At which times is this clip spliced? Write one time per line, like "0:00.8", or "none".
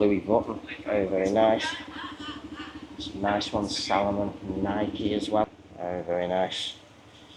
0:05.4